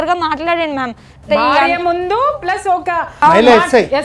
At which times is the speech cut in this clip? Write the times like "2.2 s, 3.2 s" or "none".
3.1 s

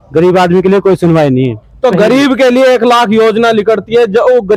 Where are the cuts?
none

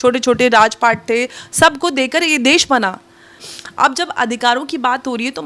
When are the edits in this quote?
3.4 s

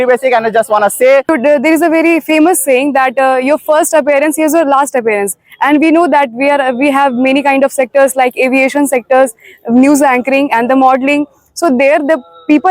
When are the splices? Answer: 1.3 s

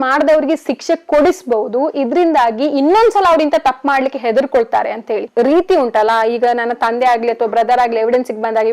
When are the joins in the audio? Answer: 5.3 s

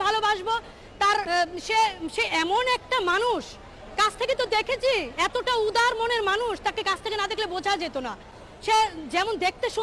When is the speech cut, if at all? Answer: none

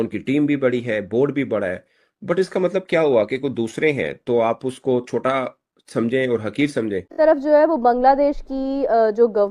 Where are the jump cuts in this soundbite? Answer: 7.1 s

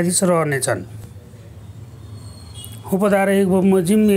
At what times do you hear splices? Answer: none

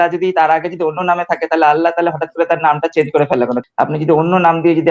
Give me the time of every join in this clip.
3.6 s

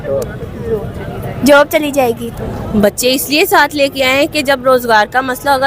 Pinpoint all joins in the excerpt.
2.3 s

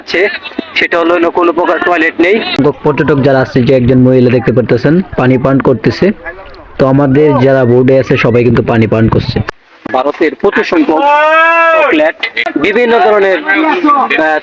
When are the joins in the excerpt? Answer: 2.6 s, 9.5 s, 12.5 s

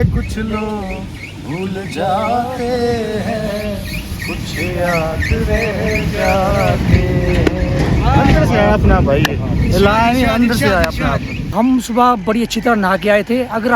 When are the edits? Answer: 11.4 s

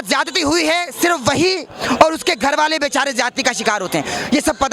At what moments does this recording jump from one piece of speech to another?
none

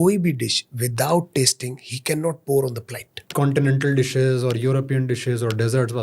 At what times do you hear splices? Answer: 3.1 s

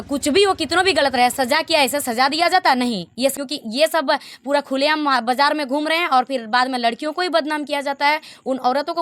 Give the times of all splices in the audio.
3.3 s

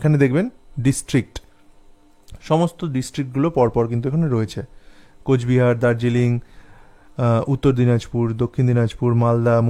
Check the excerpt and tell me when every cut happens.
none

